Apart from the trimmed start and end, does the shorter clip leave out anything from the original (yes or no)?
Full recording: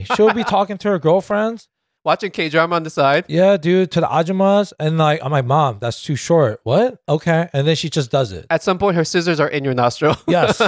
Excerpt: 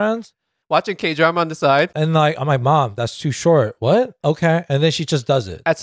yes